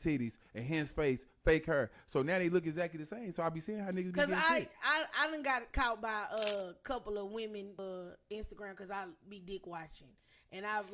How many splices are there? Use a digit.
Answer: 1